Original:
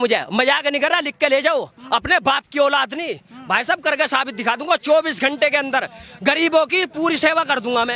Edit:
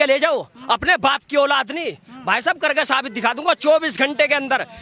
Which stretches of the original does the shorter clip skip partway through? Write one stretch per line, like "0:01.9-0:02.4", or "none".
none